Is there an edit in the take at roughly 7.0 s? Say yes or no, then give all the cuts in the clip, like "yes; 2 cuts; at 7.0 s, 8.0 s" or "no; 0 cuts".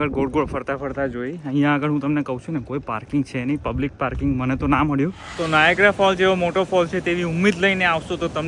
no; 1 cut; at 5.3 s